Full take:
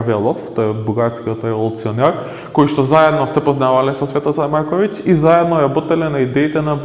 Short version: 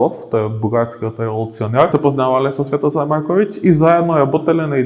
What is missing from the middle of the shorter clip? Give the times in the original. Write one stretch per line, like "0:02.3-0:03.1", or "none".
0:02.1-0:03.3